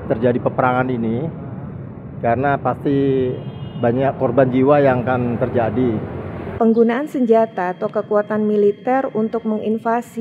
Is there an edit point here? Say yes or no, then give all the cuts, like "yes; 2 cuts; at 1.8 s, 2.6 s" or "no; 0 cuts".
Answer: yes; 1 cut; at 6.4 s